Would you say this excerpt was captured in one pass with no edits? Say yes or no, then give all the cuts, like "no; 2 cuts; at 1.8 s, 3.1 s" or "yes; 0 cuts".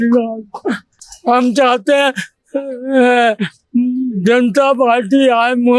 yes; 0 cuts